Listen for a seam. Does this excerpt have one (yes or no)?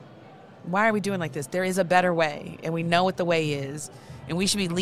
no